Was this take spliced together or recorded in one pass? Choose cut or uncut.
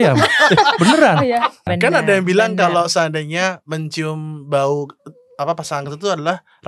cut